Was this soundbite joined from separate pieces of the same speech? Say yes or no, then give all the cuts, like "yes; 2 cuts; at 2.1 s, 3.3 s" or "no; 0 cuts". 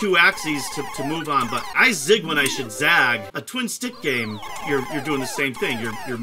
yes; 2 cuts; at 1.7 s, 3.3 s